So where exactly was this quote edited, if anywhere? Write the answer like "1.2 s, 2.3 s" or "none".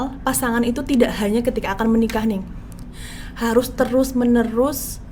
none